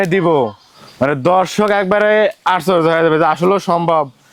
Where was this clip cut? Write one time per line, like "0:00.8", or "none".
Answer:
none